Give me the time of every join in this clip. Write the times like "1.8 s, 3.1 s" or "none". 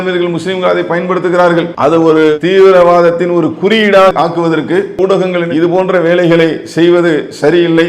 1.7 s, 4.9 s